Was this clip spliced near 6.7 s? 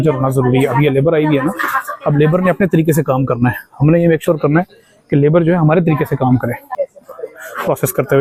yes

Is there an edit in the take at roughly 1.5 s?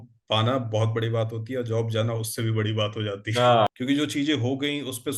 no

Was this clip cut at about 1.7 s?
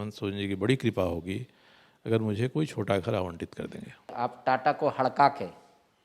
no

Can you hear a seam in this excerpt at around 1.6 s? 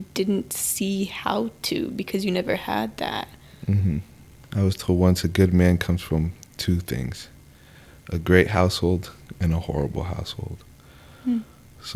no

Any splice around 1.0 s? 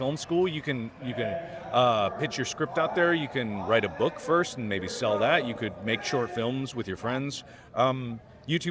no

